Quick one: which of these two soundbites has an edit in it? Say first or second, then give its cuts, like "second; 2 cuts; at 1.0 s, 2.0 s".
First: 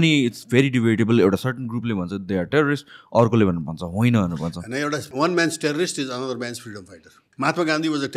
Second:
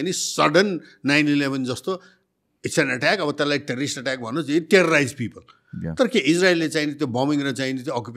first; 2 cuts; at 5.1 s, 7.2 s